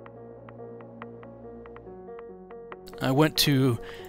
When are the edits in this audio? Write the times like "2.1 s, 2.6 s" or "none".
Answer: 2.7 s